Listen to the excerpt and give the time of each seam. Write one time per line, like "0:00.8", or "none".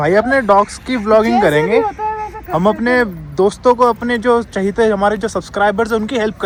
none